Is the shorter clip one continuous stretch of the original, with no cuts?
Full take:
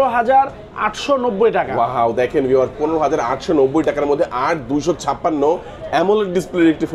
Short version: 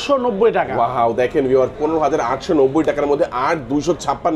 yes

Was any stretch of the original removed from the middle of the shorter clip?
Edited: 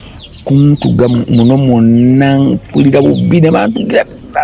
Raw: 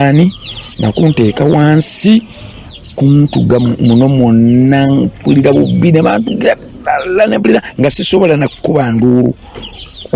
no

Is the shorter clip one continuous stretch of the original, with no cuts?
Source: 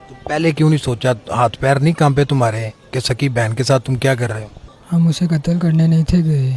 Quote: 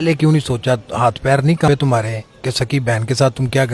no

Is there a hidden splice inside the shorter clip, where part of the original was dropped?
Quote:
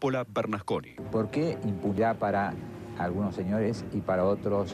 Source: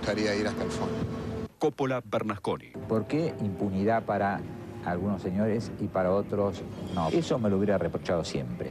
yes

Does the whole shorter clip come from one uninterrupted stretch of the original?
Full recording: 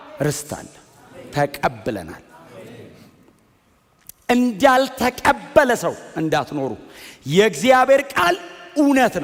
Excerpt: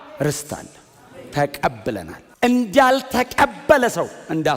no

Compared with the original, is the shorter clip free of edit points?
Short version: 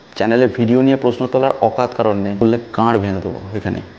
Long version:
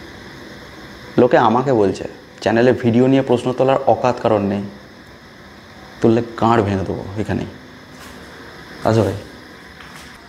no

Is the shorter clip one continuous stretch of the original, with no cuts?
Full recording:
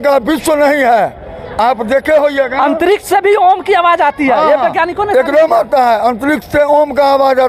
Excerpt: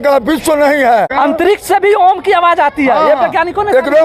no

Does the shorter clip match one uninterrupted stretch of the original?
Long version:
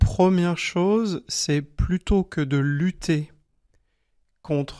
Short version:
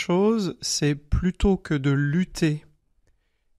yes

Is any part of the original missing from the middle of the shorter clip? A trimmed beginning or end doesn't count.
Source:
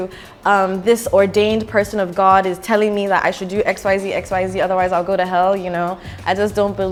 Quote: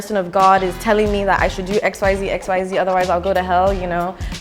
no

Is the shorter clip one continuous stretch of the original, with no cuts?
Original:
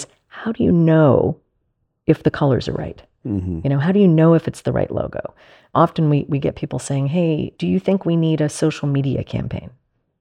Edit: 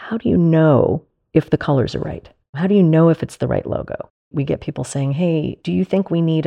no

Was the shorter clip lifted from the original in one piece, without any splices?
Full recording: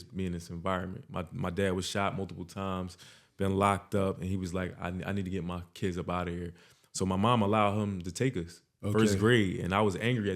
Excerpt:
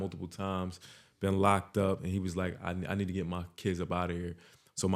yes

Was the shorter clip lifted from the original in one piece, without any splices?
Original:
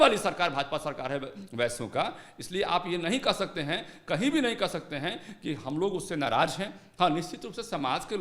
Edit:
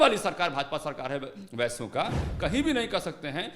no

